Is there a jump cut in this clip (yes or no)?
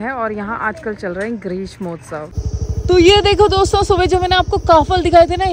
yes